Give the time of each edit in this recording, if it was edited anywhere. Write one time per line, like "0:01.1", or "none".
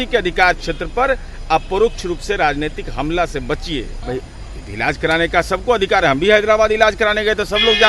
0:04.0